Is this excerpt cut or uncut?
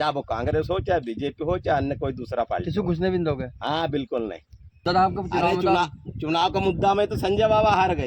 cut